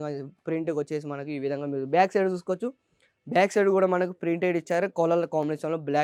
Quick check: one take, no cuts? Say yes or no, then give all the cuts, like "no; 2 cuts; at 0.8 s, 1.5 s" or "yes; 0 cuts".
yes; 0 cuts